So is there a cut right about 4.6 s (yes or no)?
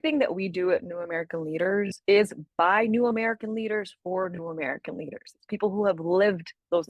no